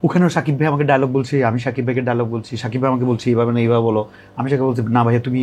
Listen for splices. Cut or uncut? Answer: uncut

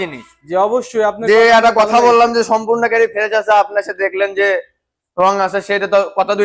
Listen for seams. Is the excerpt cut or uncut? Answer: uncut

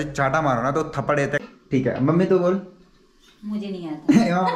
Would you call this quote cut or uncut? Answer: cut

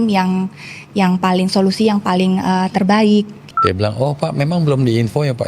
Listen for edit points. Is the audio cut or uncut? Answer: cut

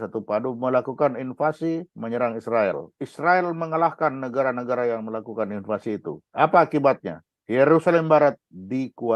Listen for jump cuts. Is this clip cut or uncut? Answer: cut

